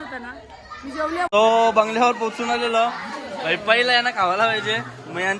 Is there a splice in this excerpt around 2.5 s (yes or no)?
no